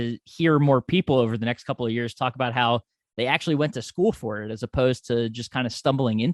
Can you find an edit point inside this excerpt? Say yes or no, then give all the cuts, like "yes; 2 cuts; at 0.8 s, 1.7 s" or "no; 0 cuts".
no; 0 cuts